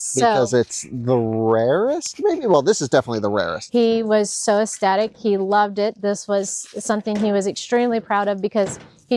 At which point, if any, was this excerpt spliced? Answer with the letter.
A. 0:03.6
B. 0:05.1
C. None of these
A